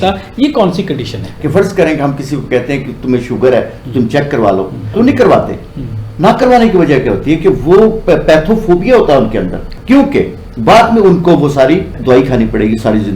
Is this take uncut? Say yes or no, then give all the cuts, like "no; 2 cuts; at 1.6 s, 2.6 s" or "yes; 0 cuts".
no; 2 cuts; at 1.3 s, 4.9 s